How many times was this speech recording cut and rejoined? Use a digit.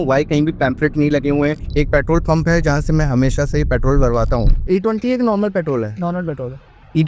2